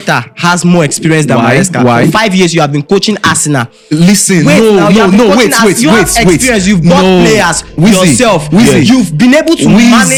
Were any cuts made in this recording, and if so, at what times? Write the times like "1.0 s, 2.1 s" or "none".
none